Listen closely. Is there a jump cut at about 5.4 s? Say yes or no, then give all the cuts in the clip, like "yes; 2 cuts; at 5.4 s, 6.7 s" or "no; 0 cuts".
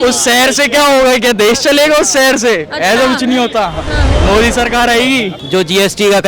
yes; 1 cut; at 5.4 s